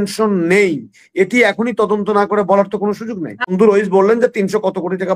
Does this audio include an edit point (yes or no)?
yes